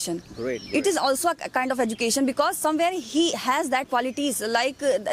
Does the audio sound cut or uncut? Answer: cut